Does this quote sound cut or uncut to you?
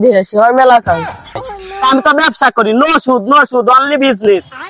cut